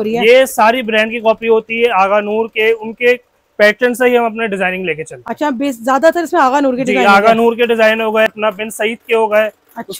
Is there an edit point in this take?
no; 0 cuts

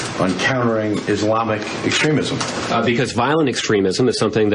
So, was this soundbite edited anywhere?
yes; 1 cut; at 2.5 s

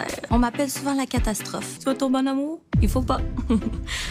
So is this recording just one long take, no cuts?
no; 1 cut; at 1.8 s

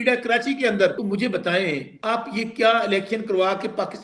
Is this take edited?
yes; 2 cuts; at 1.0 s, 1.9 s

